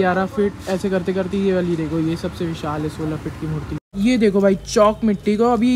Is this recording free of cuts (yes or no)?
no